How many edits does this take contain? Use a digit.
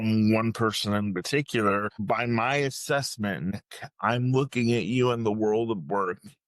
2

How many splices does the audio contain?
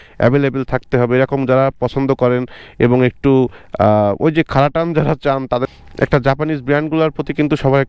1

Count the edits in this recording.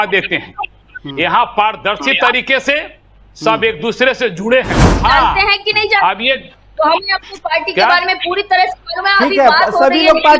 1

